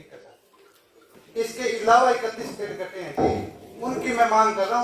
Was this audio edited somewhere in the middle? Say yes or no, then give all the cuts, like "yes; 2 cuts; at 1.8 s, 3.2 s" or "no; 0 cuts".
yes; 1 cut; at 1.1 s